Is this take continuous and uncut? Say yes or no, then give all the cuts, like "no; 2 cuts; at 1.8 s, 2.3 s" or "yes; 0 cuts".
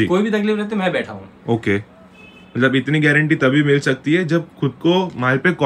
yes; 0 cuts